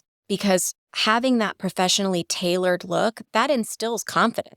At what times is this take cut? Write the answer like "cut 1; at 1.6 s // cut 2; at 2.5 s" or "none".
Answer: cut 1; at 3.2 s